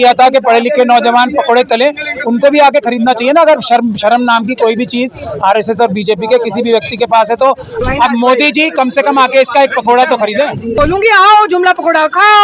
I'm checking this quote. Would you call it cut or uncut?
cut